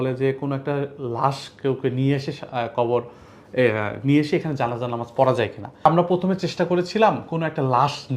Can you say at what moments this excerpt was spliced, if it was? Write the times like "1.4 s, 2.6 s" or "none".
5.9 s